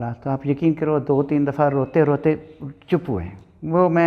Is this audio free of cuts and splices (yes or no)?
yes